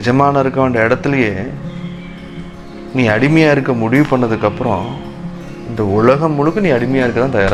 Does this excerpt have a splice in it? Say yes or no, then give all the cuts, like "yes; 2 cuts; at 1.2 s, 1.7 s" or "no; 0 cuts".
no; 0 cuts